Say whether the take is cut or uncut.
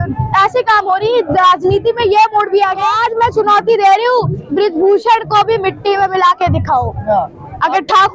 cut